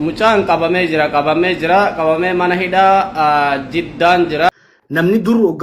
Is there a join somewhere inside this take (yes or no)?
yes